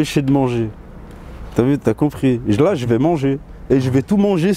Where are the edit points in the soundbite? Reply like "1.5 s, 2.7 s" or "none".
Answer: none